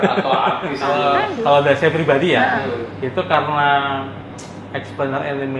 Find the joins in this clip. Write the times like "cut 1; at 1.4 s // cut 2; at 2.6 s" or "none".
cut 1; at 0.9 s